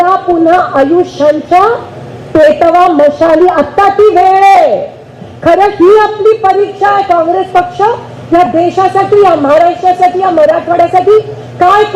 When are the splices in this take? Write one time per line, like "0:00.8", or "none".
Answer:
none